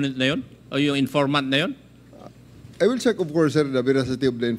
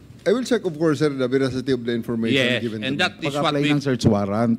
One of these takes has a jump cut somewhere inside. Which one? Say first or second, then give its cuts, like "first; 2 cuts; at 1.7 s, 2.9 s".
second; 1 cut; at 3.3 s